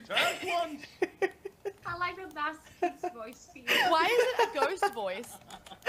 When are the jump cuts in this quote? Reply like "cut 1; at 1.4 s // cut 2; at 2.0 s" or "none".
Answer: cut 1; at 1.8 s